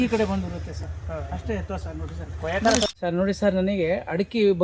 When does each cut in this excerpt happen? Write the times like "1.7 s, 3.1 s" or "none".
2.9 s